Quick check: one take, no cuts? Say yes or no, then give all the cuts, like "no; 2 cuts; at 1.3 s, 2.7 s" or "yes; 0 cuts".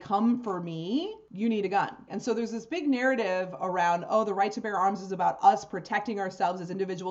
yes; 0 cuts